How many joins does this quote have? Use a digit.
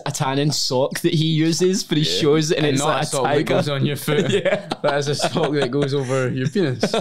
0